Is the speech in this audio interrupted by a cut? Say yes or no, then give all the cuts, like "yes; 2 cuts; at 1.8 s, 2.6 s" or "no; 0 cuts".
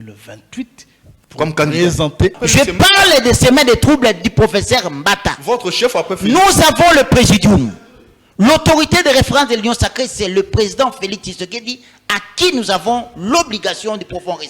yes; 1 cut; at 2.4 s